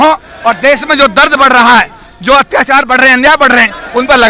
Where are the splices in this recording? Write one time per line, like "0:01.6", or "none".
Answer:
none